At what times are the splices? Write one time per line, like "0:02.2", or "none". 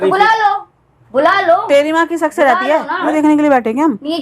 0:03.1